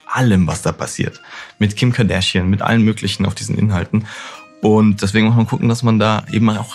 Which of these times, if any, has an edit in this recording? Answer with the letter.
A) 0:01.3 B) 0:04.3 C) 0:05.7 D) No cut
D